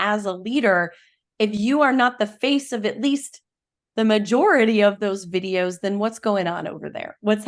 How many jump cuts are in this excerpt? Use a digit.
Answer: 1